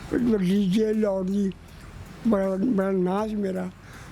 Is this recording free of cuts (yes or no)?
yes